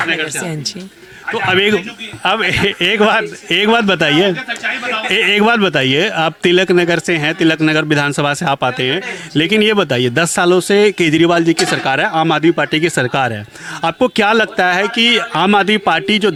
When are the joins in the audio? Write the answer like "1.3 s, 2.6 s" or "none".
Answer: none